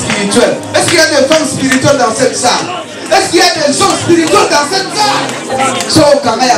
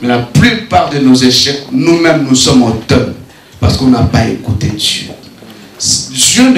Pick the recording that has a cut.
first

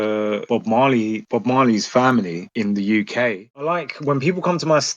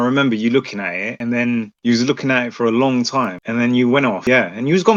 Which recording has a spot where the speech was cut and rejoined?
first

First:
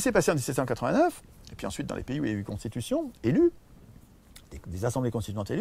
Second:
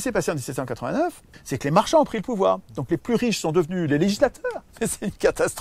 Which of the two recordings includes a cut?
second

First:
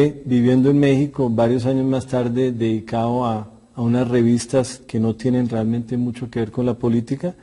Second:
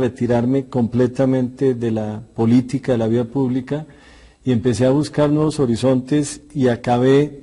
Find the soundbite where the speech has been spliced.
second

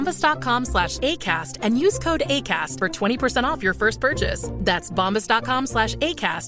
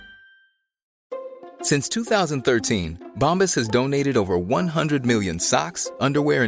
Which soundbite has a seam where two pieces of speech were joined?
second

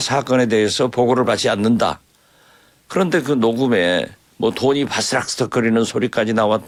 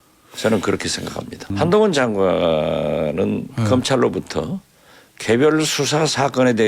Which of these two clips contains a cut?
second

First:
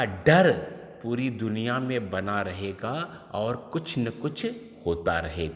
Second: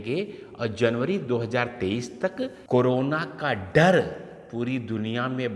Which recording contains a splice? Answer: second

